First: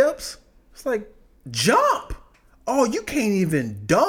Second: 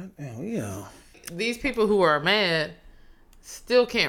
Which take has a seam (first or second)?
second